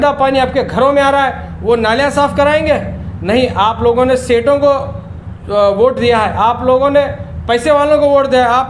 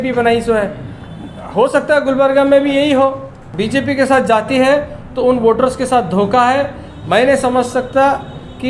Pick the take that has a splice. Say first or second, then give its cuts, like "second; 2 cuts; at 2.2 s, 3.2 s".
second; 1 cut; at 3.4 s